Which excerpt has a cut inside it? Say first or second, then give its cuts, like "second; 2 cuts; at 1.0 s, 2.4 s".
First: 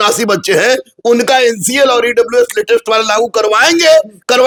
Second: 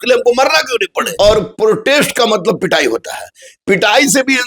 second; 1 cut; at 1.0 s